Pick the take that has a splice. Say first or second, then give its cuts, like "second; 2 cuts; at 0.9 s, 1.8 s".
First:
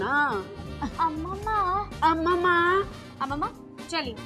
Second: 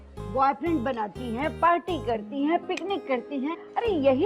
second; 1 cut; at 1.5 s